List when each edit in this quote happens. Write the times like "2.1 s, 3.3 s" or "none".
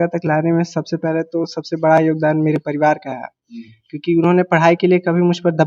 none